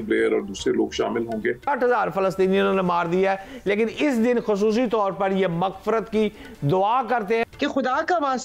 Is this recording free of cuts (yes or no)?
no